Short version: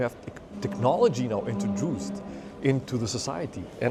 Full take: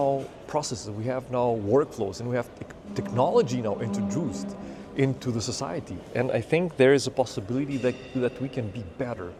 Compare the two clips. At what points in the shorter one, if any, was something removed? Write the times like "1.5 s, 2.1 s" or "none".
none